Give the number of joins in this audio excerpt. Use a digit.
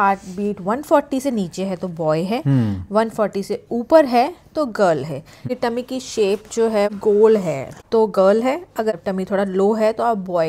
4